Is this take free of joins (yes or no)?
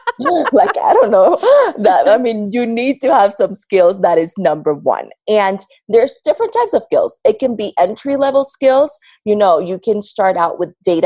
yes